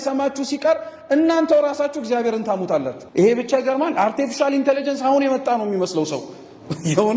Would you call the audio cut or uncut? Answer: cut